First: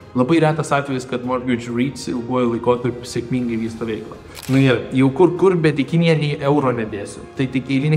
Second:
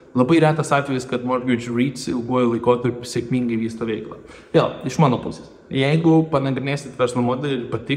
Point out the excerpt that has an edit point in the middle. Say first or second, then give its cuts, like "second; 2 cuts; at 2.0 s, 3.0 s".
first; 1 cut; at 4.3 s